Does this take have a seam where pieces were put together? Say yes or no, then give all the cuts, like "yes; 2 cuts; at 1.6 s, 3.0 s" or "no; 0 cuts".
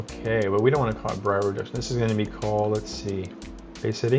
no; 0 cuts